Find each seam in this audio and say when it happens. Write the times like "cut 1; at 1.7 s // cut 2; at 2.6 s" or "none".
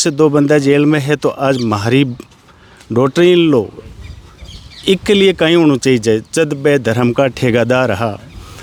none